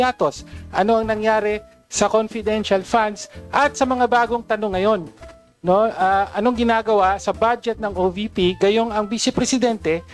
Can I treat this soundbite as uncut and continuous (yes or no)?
yes